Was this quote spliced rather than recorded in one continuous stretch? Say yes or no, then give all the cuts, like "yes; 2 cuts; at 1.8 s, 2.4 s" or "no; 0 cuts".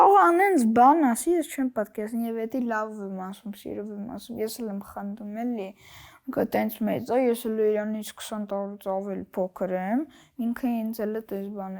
no; 0 cuts